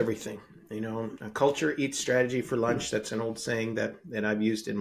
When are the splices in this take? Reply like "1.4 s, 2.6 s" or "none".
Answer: none